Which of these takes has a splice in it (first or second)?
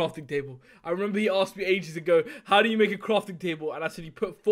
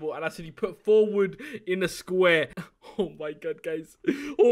second